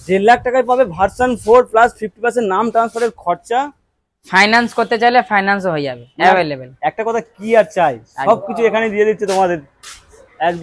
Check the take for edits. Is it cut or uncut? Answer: uncut